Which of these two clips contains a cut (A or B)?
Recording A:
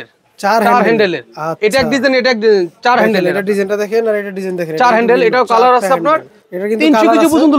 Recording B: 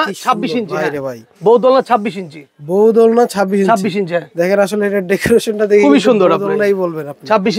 A